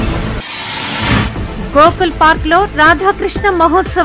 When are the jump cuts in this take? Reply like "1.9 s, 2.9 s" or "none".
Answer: 1.2 s